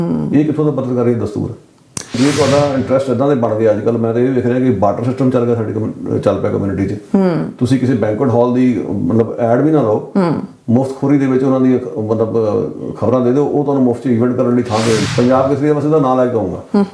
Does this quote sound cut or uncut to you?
cut